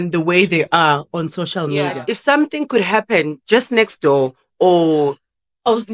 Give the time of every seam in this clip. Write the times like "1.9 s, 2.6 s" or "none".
2.0 s